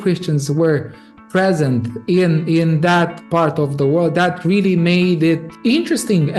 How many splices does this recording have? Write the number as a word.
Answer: one